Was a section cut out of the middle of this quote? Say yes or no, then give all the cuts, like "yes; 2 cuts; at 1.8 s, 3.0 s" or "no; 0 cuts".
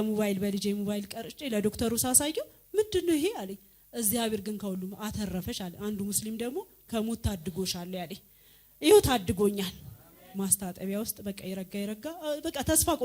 yes; 1 cut; at 10.2 s